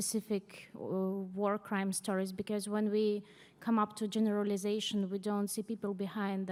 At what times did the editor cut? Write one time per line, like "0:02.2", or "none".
none

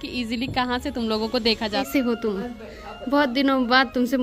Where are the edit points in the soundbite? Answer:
0:01.9

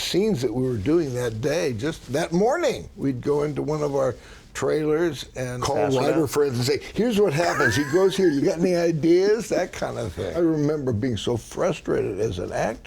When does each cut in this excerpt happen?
0:02.0
0:05.6
0:10.4

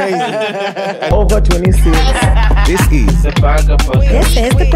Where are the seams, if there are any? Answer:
0:01.1

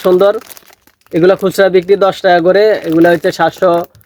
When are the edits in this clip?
none

